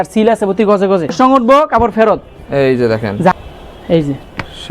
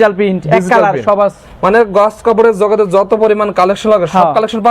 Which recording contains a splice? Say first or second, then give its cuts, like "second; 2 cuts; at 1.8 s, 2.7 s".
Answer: first; 2 cuts; at 1.1 s, 3.3 s